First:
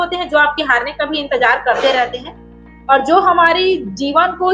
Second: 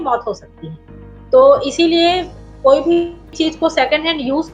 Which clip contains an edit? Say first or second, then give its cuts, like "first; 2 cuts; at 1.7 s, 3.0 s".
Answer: second; 1 cut; at 3.2 s